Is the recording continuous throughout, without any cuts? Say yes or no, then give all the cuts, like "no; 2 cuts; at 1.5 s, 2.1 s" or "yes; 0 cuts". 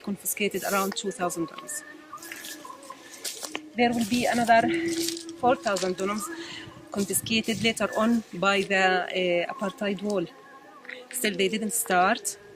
yes; 0 cuts